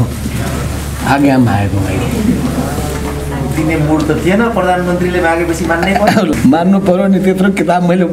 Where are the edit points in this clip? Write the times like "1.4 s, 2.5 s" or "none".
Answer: 6.3 s